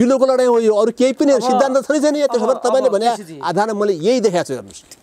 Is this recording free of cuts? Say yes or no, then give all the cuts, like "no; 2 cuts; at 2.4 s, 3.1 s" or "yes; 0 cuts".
yes; 0 cuts